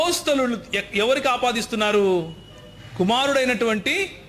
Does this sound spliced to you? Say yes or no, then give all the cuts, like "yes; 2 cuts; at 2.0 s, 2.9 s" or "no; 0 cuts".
no; 0 cuts